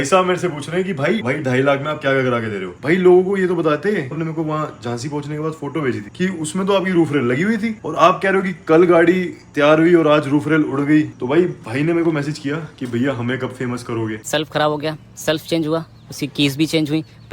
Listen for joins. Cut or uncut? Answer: cut